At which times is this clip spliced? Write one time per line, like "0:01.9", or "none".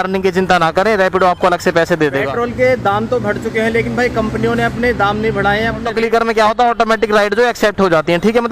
0:02.2
0:05.9